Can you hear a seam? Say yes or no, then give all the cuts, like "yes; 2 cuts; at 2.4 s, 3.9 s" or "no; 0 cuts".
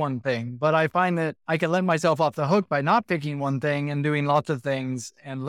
yes; 1 cut; at 1.4 s